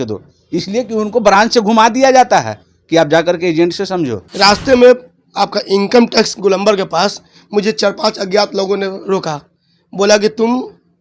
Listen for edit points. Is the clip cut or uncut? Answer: cut